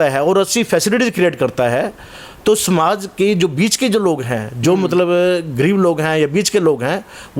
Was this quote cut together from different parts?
no; 0 cuts

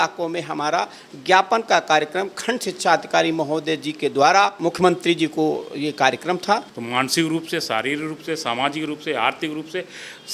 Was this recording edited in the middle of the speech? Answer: yes; 2 cuts; at 4.6 s, 6.8 s

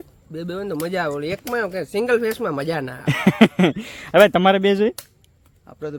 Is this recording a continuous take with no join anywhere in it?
yes; 0 cuts

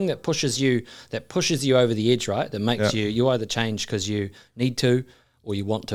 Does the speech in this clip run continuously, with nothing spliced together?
yes; 0 cuts

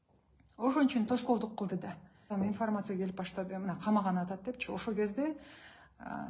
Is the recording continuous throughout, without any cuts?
no; 1 cut; at 2.2 s

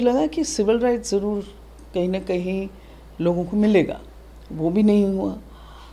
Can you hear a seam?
no; 0 cuts

